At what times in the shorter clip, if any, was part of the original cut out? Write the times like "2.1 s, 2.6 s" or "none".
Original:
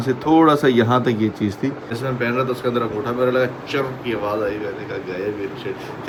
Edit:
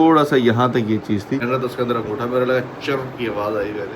1.4 s